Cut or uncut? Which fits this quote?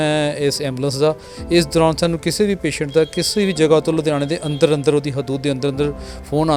uncut